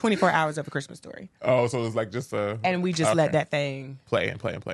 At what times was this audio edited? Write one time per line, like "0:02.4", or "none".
none